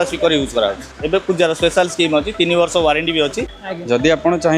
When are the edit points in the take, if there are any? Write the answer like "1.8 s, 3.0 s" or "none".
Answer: 0.9 s, 3.5 s